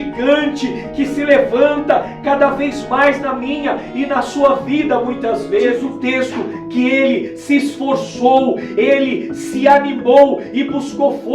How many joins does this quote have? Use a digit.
1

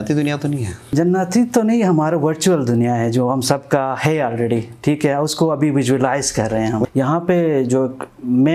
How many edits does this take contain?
2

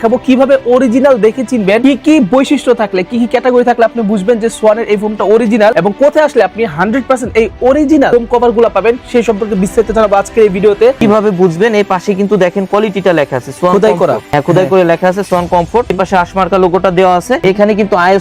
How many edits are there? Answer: 4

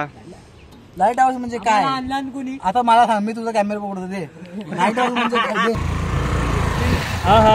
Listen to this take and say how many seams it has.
1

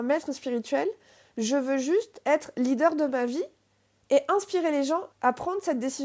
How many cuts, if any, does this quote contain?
1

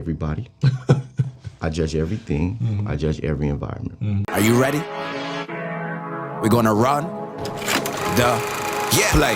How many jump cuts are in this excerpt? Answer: 1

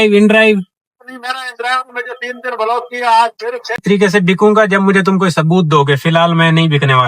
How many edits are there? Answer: 1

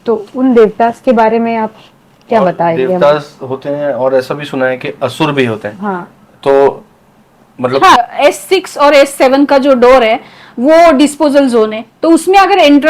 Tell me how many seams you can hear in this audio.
1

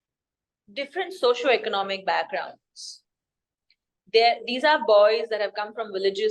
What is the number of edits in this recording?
0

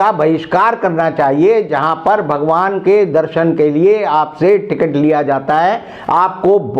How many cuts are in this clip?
0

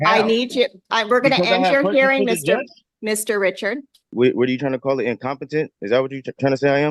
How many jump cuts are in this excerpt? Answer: 1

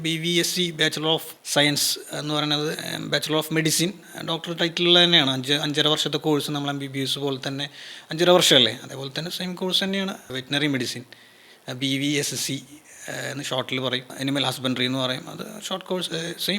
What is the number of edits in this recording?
3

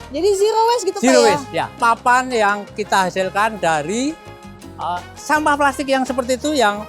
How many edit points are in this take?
2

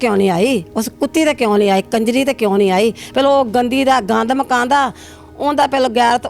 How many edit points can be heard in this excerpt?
0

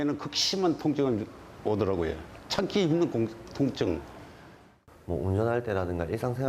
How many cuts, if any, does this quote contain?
1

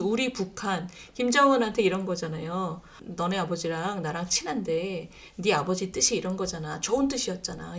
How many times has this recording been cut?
1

